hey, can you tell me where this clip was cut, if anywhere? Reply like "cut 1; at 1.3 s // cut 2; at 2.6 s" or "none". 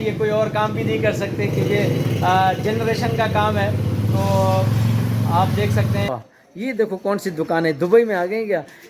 cut 1; at 6.1 s